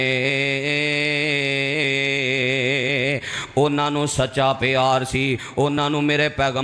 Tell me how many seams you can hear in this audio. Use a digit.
0